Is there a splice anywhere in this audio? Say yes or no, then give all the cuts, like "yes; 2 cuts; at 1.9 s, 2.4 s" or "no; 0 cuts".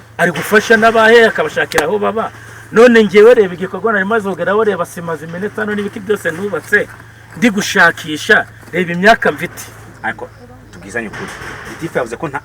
no; 0 cuts